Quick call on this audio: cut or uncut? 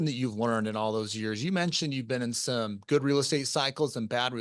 uncut